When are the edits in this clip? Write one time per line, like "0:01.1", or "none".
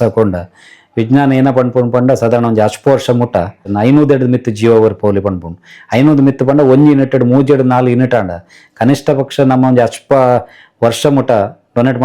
0:03.7